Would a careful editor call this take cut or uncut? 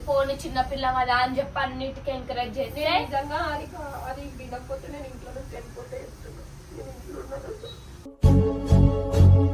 uncut